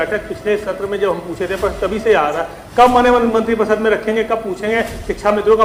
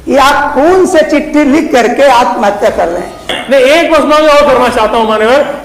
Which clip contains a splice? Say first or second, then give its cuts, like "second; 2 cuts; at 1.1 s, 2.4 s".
second; 1 cut; at 3.3 s